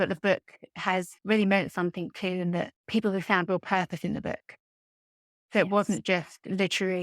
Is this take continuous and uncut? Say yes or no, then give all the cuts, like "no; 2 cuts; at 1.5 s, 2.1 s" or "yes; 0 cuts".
no; 1 cut; at 1.1 s